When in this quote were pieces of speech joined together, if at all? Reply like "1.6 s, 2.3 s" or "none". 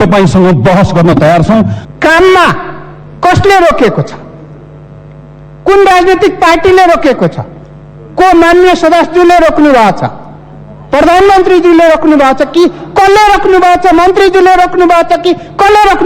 1.8 s